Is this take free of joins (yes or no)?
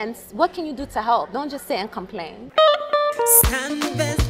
no